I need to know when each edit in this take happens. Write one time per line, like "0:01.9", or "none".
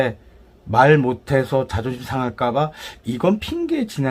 none